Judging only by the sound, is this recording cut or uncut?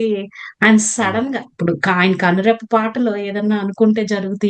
uncut